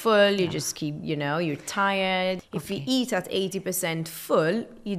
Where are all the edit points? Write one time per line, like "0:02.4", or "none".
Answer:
0:02.4